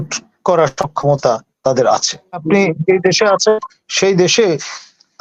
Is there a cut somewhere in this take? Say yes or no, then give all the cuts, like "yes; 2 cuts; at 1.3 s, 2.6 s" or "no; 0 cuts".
yes; 1 cut; at 2.4 s